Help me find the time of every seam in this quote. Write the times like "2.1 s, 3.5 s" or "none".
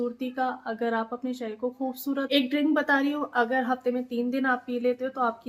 2.3 s